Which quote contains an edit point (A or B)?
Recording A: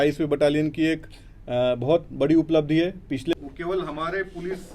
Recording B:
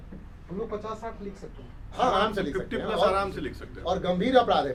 A